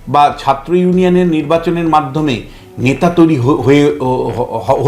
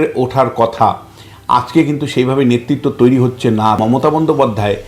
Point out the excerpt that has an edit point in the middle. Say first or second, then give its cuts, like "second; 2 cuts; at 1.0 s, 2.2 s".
second; 1 cut; at 3.8 s